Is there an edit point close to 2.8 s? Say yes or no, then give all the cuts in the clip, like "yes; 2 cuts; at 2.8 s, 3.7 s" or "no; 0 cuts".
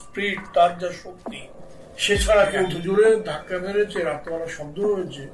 yes; 1 cut; at 2.8 s